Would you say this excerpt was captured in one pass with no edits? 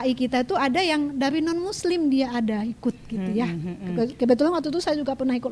yes; 0 cuts

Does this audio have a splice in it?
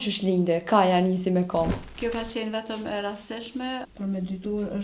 yes; 1 cut; at 3.9 s

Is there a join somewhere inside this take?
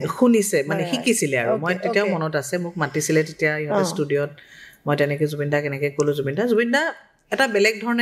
no; 0 cuts

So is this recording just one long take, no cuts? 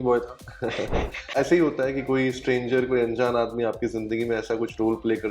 no; 1 cut; at 1.2 s

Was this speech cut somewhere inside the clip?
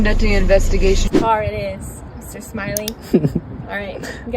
yes; 1 cut; at 1.0 s

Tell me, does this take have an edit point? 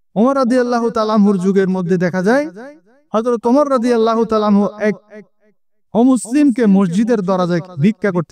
no; 0 cuts

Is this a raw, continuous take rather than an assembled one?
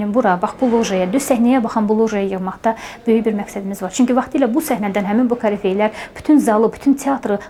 yes; 0 cuts

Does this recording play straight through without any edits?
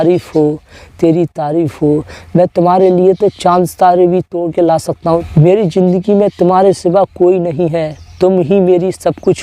no; 1 cut; at 5.2 s

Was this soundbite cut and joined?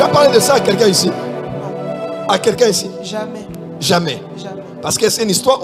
no; 0 cuts

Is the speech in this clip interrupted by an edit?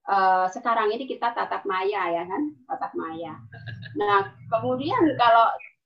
no; 0 cuts

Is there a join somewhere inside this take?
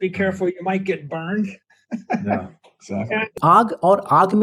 yes; 1 cut; at 3.3 s

